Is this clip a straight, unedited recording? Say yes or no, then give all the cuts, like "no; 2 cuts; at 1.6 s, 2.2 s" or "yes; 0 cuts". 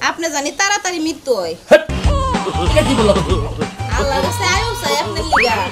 yes; 0 cuts